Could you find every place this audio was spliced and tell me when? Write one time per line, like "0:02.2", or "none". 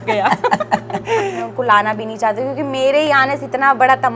0:01.4